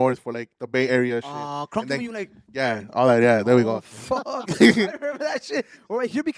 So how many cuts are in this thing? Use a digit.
0